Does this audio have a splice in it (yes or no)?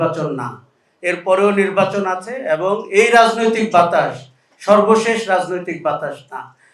no